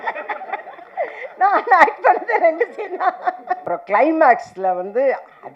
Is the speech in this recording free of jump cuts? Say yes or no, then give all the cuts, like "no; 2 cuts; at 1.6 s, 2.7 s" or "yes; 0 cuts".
no; 1 cut; at 3.6 s